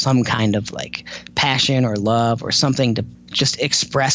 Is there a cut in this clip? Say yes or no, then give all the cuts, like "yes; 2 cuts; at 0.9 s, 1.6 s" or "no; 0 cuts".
yes; 1 cut; at 3.2 s